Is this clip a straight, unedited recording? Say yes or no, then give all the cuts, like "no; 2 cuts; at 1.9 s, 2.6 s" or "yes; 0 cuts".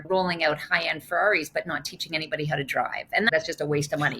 no; 1 cut; at 3.3 s